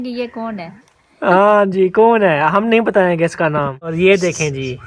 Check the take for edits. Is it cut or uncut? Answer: cut